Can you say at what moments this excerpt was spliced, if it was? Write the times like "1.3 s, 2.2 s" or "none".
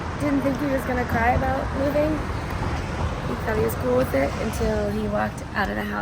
none